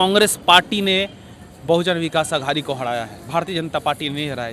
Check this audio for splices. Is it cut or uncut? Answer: uncut